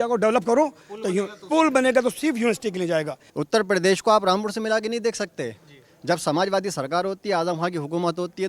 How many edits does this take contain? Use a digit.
1